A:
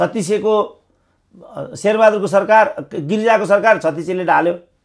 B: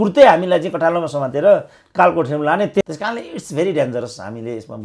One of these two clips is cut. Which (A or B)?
B